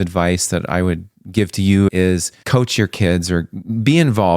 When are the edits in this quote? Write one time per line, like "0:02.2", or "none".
0:01.9